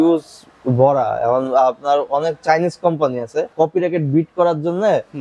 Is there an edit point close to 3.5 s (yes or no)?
yes